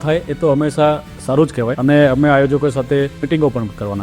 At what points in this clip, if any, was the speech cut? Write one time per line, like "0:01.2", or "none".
none